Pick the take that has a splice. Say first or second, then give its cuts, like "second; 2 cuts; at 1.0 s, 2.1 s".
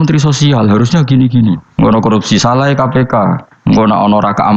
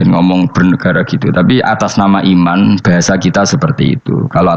first; 2 cuts; at 1.6 s, 3.5 s